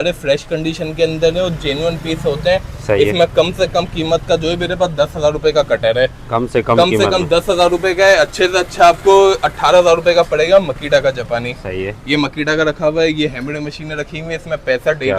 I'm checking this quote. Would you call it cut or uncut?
uncut